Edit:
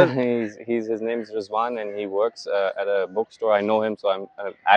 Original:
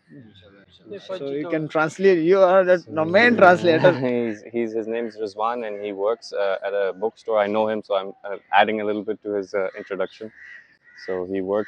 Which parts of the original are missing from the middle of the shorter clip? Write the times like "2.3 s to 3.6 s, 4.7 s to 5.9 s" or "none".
none